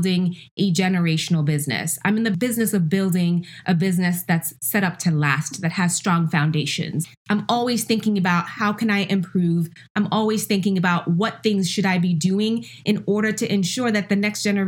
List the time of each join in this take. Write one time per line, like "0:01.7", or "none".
0:04.5
0:07.0